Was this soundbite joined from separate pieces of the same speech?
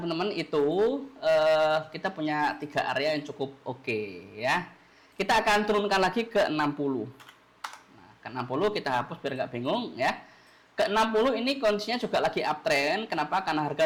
no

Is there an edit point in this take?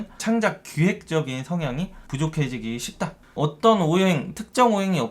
yes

